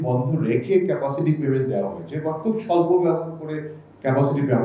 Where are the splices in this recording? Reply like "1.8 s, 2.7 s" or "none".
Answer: none

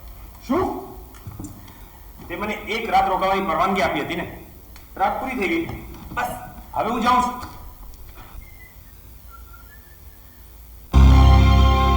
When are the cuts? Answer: 10.9 s

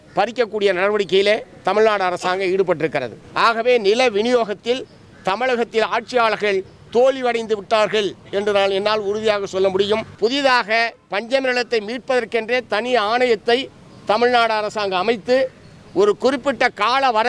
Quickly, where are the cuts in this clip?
3.2 s, 10.1 s

